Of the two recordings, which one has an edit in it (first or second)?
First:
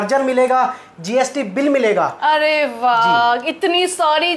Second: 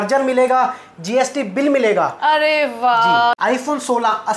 second